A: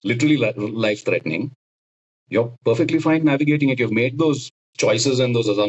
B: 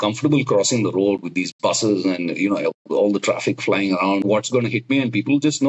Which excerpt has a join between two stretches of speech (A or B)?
B